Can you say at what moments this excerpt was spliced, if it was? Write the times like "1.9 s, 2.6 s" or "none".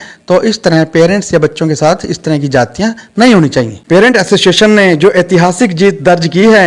3.8 s